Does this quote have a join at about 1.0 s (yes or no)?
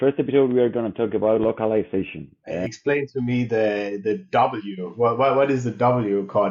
no